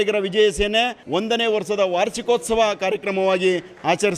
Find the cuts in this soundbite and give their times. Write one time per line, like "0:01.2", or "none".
0:01.0